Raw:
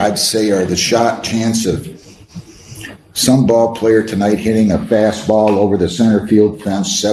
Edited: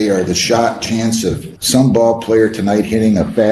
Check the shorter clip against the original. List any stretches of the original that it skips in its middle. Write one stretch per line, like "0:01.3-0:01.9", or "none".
0:01.9-0:03.1